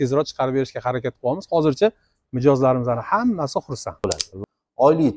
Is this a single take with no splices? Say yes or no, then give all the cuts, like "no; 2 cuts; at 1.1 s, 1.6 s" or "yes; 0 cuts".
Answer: no; 1 cut; at 4.1 s